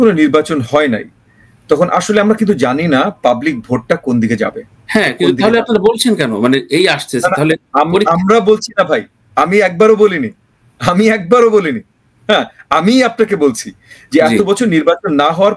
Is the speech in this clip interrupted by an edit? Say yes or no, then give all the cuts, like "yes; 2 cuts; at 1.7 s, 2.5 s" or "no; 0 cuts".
no; 0 cuts